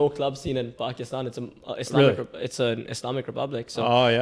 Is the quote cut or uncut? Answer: uncut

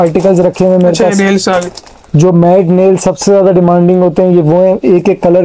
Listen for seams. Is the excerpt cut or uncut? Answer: uncut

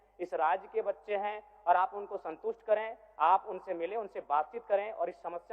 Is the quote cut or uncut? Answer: uncut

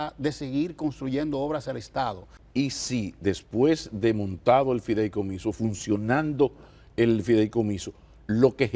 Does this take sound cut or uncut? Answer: cut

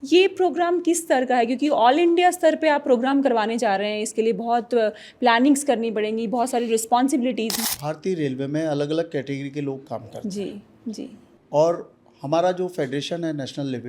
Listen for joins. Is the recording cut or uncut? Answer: cut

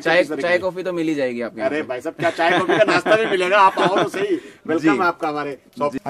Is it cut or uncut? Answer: uncut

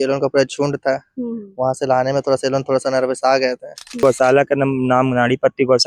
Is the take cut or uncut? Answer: cut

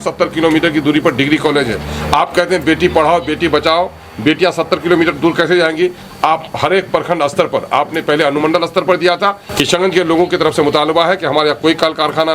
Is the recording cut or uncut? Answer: cut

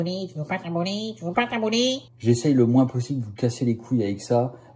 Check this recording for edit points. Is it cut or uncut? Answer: cut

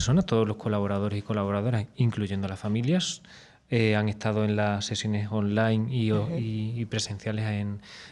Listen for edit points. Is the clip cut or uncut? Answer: uncut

